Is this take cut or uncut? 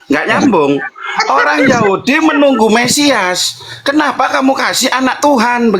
uncut